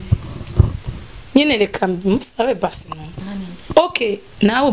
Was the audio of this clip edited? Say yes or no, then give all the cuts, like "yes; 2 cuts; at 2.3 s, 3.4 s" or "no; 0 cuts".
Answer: yes; 1 cut; at 3.3 s